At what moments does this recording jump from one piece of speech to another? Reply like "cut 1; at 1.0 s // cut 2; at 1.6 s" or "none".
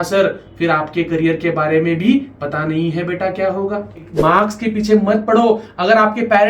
cut 1; at 4.1 s